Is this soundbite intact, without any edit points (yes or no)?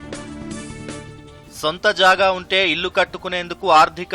no